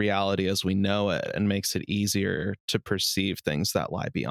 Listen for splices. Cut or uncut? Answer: uncut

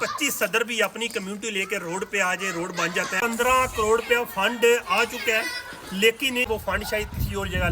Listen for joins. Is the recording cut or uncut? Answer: cut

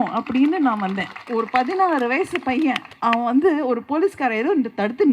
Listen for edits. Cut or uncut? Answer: cut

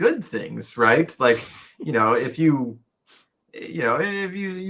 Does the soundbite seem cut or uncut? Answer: uncut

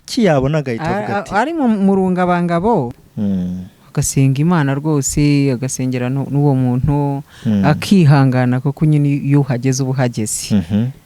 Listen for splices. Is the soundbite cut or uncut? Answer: cut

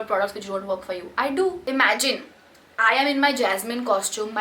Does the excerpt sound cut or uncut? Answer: cut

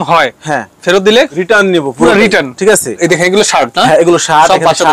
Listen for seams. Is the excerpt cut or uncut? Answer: cut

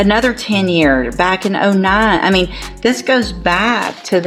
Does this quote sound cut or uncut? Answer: uncut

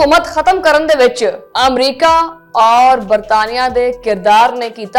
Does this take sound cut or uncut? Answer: uncut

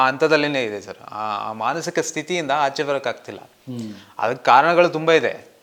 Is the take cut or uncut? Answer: uncut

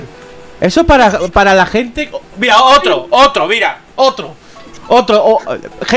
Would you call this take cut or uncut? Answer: uncut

